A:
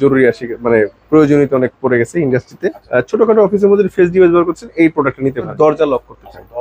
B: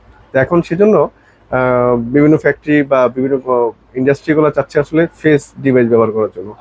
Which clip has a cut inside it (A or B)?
A